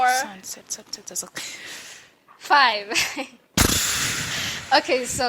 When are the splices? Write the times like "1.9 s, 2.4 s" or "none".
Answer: none